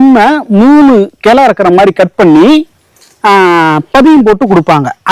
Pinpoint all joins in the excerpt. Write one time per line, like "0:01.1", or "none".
none